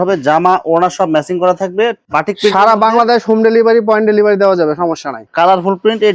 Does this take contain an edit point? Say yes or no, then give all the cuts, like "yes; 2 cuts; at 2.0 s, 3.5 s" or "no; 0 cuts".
yes; 2 cuts; at 2.0 s, 5.3 s